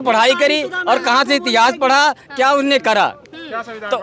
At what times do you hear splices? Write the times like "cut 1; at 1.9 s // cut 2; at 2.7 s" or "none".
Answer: none